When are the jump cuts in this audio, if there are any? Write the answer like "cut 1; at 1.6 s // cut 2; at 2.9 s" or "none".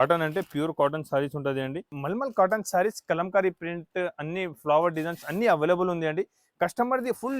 cut 1; at 2.0 s